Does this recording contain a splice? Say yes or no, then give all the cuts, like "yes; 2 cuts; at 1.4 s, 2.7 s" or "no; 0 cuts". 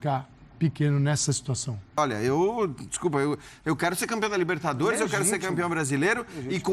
yes; 1 cut; at 2.0 s